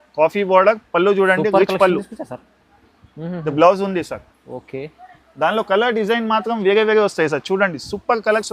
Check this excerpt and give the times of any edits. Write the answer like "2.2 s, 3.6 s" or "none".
none